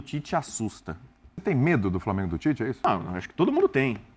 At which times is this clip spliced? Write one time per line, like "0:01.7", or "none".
0:01.4
0:02.8